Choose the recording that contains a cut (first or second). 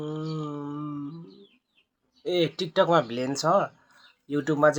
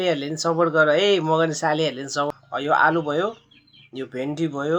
second